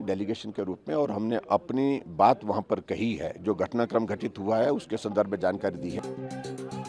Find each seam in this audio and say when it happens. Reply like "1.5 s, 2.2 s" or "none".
6.0 s